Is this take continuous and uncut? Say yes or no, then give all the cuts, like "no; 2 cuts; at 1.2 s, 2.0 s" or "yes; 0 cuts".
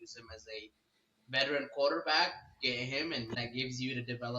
no; 1 cut; at 3.4 s